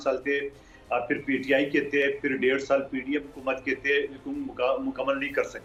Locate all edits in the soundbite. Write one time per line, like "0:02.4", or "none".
none